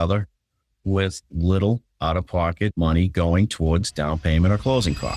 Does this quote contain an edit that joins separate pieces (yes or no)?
yes